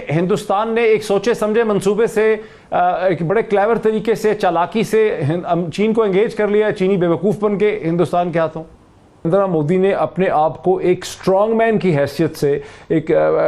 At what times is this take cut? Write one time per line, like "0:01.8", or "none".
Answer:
0:09.3